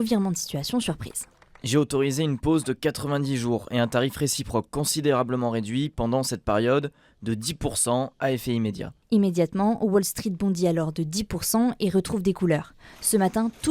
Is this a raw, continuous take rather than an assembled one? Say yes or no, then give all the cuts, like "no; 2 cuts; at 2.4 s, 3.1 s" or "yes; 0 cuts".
no; 1 cut; at 8.9 s